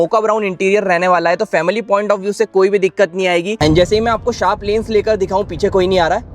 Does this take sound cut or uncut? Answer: cut